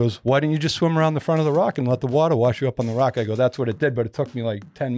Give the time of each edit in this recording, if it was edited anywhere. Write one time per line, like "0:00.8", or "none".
none

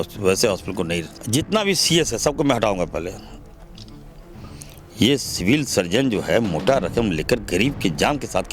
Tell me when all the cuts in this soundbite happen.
0:01.1

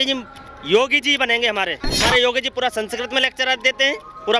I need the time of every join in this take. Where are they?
0:01.9

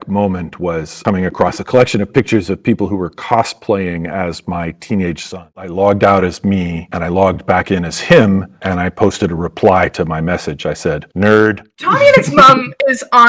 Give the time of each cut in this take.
0:05.4
0:11.7

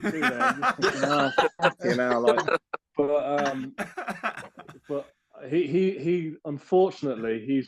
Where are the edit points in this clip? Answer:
none

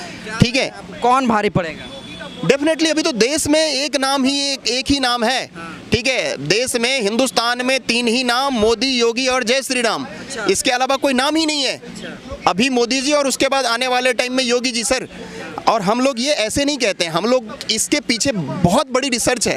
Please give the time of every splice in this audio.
none

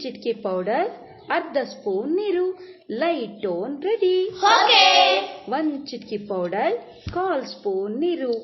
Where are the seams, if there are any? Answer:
0:06.2

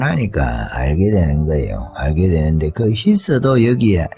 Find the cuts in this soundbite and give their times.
none

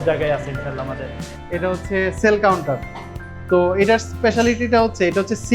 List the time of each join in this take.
0:01.2

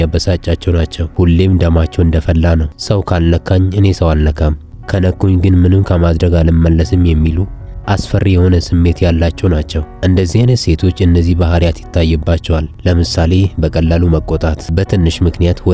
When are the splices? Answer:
none

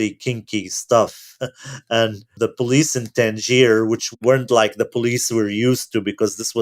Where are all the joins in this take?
0:02.2
0:04.1

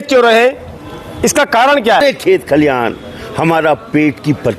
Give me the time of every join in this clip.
0:02.0

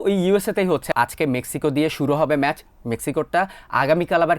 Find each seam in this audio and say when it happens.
0:00.9

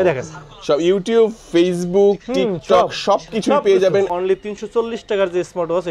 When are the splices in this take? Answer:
0:04.1

